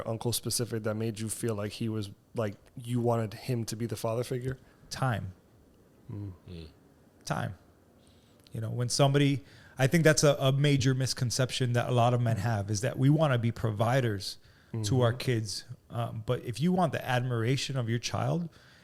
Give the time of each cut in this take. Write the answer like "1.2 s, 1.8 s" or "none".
none